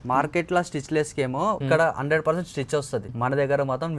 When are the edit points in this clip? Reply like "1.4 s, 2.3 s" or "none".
1.6 s, 3.1 s